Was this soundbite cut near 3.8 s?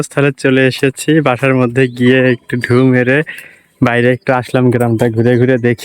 no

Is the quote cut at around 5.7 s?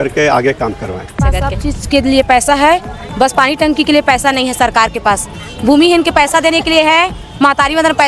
no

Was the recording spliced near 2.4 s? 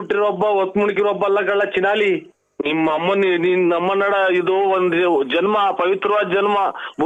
no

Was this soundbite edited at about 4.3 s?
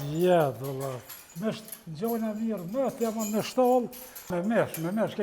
yes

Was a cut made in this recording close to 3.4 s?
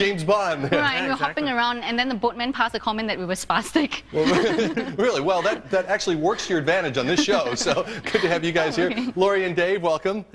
no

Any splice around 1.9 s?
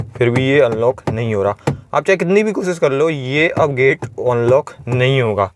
no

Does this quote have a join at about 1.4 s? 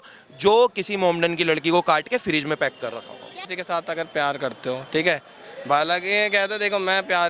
no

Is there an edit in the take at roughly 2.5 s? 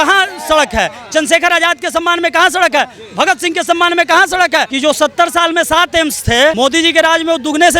no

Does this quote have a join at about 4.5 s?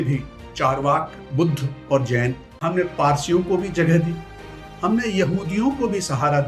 no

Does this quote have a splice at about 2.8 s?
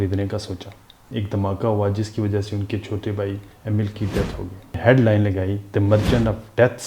no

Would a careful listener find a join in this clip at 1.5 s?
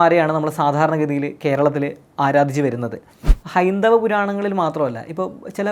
no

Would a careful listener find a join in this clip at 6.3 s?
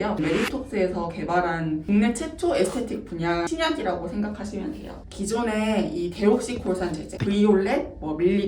no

